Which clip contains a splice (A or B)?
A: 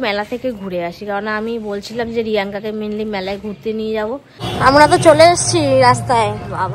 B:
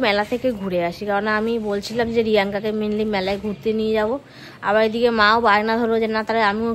A